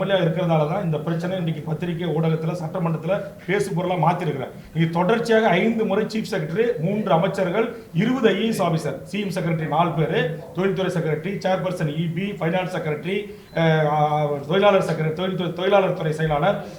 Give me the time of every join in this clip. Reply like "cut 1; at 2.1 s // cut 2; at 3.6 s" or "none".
none